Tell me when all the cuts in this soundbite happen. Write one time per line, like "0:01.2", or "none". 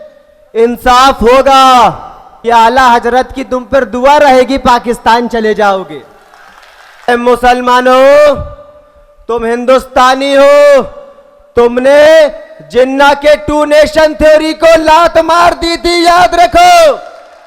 0:02.3
0:07.1